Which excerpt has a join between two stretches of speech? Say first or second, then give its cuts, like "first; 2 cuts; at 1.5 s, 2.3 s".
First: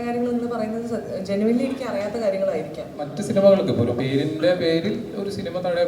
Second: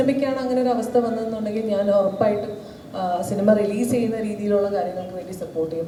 first; 1 cut; at 3.1 s